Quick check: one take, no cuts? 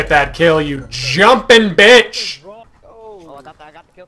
no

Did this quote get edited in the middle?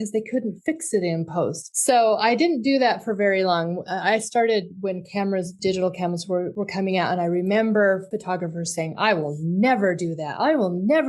yes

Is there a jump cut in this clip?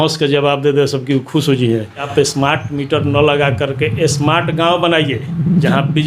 yes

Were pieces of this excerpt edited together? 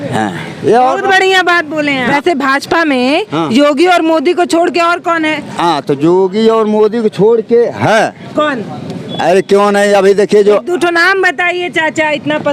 yes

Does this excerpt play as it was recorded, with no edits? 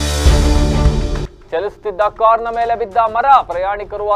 yes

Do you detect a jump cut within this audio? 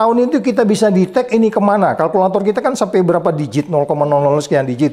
no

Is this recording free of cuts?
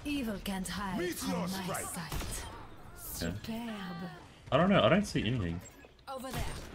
yes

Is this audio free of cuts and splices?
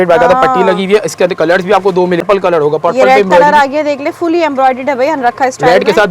no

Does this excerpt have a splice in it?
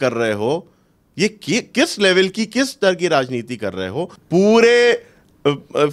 yes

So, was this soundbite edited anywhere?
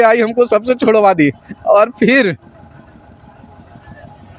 no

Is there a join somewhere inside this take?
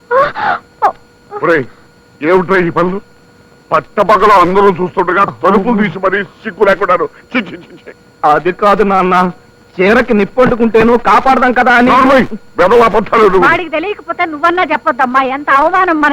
no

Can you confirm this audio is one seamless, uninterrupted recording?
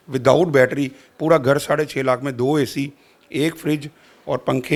yes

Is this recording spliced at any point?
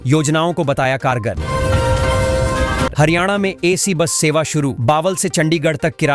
no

